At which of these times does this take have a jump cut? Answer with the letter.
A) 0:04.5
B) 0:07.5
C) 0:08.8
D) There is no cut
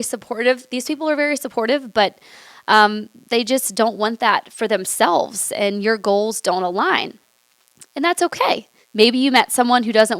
C